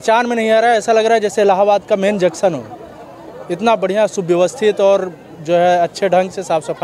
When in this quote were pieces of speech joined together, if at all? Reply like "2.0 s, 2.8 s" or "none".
none